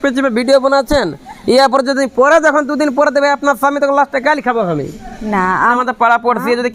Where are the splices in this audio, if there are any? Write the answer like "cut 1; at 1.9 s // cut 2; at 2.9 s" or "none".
cut 1; at 5.8 s